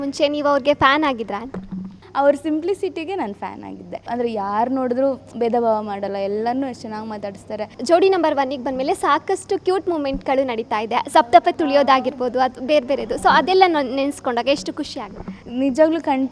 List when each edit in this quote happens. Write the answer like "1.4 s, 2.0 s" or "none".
2.0 s, 4.1 s, 7.8 s, 11.6 s

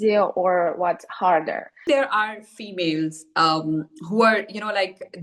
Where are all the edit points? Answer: 1.8 s

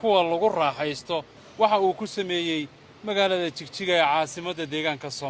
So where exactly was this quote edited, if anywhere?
1.4 s

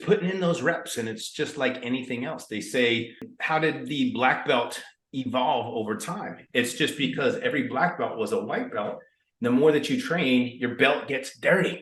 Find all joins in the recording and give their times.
3.3 s

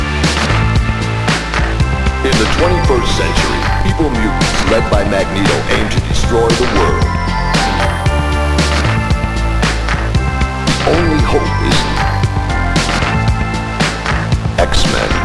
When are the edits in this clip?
none

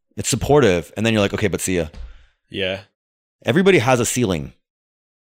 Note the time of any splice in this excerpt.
2.8 s

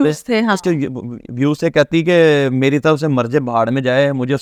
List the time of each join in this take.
none

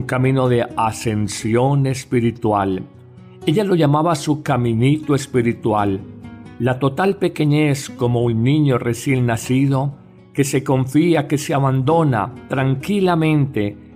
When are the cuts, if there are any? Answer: 12.3 s

